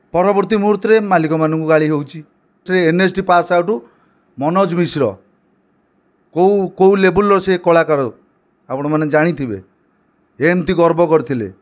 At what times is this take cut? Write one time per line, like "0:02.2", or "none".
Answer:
0:02.7

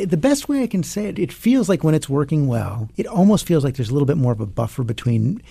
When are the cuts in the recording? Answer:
0:01.1
0:02.9

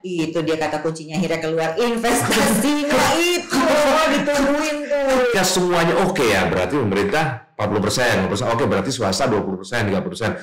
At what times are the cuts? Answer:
0:05.3

